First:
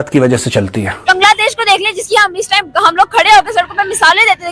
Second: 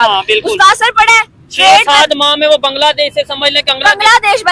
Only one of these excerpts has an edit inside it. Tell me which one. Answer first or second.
first